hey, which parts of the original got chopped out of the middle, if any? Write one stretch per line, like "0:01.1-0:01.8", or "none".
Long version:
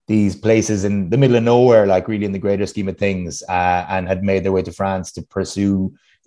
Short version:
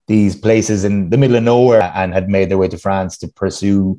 0:01.8-0:03.8